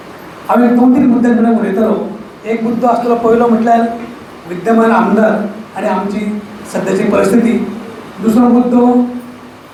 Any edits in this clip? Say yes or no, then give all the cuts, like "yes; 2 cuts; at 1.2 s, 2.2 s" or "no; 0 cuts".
no; 0 cuts